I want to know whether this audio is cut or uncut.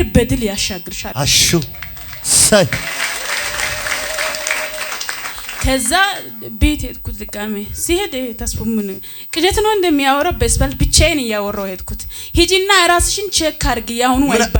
cut